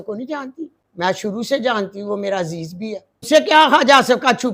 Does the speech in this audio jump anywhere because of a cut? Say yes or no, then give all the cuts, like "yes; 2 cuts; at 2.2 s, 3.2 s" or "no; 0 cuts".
yes; 2 cuts; at 1.3 s, 3.3 s